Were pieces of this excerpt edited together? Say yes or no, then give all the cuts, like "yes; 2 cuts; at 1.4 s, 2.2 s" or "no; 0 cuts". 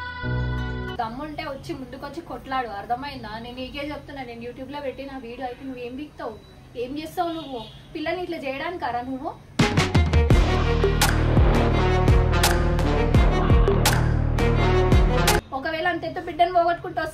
yes; 2 cuts; at 0.9 s, 15.4 s